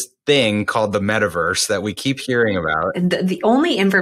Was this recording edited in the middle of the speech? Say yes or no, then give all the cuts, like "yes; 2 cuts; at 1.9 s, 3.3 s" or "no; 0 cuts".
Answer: yes; 1 cut; at 2.7 s